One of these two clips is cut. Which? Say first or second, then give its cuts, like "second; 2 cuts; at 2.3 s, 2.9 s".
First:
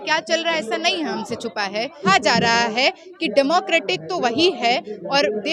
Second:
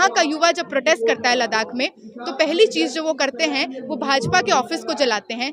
first; 1 cut; at 2.0 s